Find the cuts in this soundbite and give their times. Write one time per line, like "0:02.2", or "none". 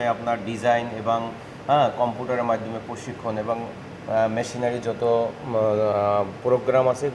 none